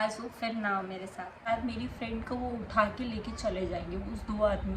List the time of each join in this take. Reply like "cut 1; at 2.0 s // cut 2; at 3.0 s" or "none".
cut 1; at 1.5 s